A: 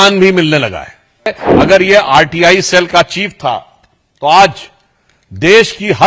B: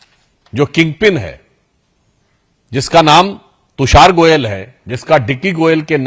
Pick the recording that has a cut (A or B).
A